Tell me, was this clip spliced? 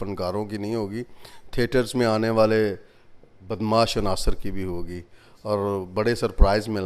no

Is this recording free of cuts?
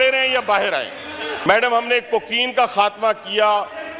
no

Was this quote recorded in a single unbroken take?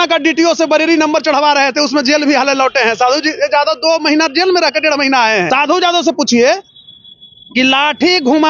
no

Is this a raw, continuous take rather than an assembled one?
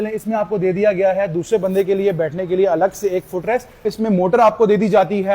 no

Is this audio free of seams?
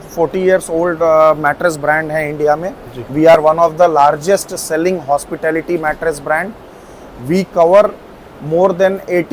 yes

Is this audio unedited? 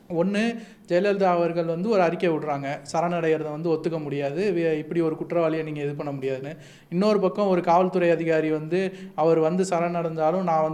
yes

